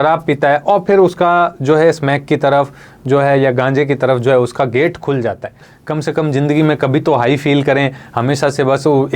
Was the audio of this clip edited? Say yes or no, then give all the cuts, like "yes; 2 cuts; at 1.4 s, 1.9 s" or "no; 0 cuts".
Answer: yes; 1 cut; at 5.7 s